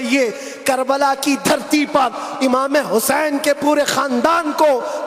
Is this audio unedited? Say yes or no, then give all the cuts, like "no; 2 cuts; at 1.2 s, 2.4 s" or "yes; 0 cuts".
yes; 0 cuts